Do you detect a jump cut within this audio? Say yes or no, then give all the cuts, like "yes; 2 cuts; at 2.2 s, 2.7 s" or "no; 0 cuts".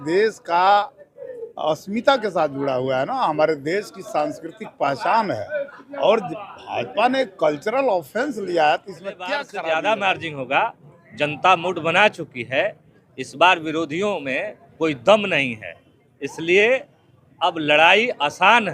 yes; 1 cut; at 9.5 s